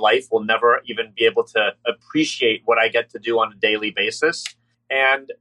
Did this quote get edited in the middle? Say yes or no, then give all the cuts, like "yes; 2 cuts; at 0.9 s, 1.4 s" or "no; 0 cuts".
no; 0 cuts